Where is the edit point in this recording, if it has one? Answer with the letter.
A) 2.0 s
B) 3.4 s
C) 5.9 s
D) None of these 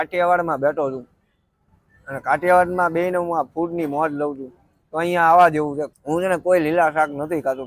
C